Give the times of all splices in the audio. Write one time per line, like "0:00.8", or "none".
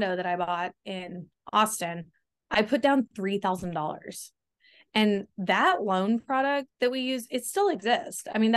none